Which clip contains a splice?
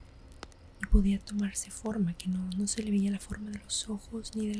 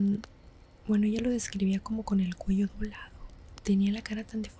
second; 1 cut; at 3.5 s

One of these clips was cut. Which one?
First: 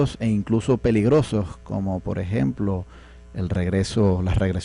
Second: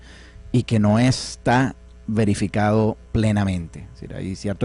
first; 1 cut; at 2.2 s

